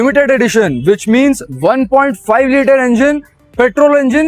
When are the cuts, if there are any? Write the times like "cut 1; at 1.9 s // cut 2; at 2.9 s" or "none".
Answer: none